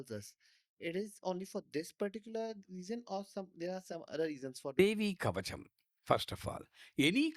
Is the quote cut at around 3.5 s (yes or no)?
no